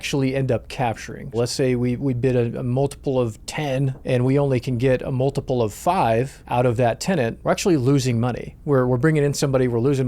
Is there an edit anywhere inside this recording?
yes; 4 cuts; at 1.3 s, 4.0 s, 6.4 s, 7.4 s

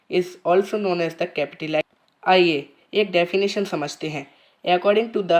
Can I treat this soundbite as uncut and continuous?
no; 1 cut; at 2.0 s

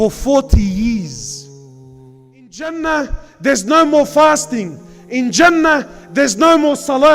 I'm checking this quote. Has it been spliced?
yes; 1 cut; at 2.6 s

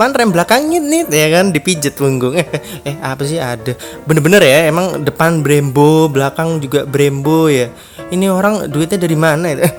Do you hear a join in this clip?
no; 0 cuts

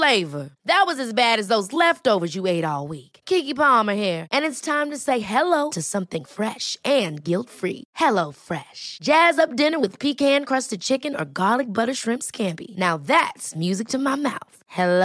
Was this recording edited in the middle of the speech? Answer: no; 0 cuts

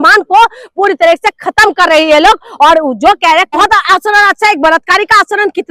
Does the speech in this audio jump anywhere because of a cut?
yes; 1 cut; at 3.6 s

